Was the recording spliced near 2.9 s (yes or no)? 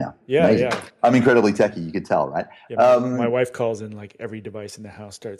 no